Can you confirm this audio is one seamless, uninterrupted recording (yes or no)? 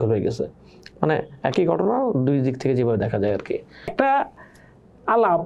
no